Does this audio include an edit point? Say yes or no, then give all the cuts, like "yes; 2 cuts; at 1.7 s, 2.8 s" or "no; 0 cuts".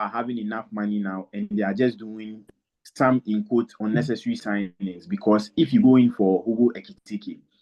no; 0 cuts